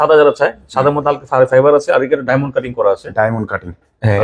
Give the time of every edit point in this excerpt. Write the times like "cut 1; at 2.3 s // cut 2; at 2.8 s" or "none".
none